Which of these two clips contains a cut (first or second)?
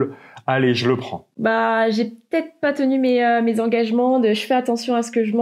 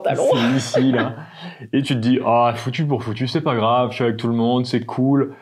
first